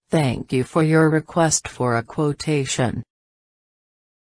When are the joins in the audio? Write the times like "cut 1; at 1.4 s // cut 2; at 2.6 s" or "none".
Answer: cut 1; at 1.0 s